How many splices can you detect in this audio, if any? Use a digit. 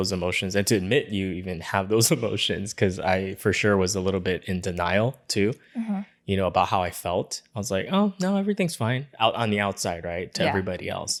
0